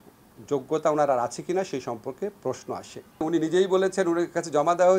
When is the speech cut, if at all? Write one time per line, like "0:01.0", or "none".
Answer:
0:03.2